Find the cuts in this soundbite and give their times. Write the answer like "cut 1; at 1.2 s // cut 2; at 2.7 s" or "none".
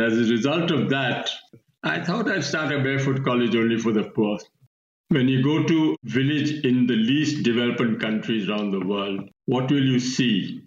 cut 1; at 1.6 s // cut 2; at 4.6 s